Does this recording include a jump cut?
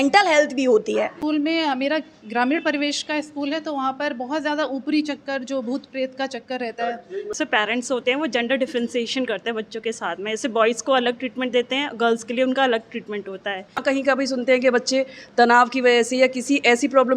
yes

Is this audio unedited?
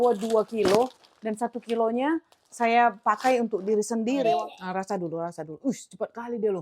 no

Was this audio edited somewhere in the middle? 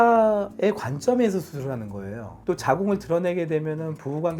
yes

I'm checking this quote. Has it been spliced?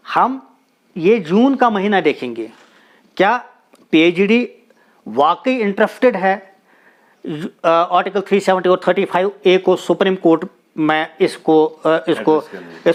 no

